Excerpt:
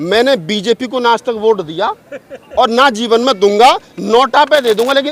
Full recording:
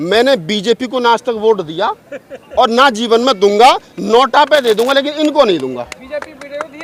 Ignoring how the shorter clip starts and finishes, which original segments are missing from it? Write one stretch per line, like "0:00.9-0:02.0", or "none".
none